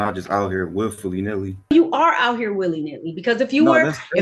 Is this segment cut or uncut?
cut